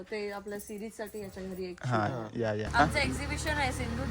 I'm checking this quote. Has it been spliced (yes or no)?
yes